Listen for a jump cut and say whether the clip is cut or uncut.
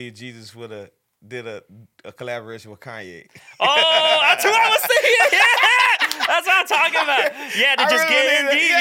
uncut